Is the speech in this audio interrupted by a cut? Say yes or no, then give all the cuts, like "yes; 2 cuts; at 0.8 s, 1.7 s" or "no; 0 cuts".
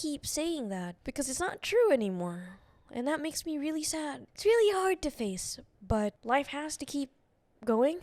yes; 3 cuts; at 1.0 s, 4.3 s, 6.2 s